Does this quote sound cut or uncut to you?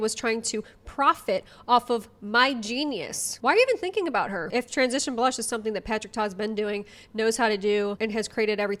uncut